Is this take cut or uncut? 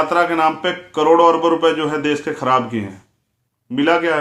uncut